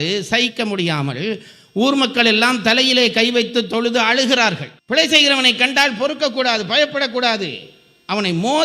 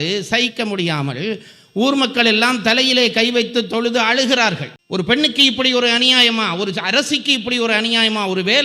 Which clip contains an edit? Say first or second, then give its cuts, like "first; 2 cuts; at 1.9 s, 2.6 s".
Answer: first; 1 cut; at 4.7 s